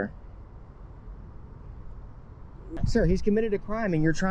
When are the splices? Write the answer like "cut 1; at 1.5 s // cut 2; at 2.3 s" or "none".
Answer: cut 1; at 2.8 s